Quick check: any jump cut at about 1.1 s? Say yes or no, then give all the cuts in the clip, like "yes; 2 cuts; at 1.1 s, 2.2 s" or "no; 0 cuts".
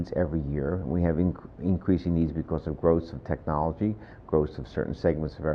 no; 0 cuts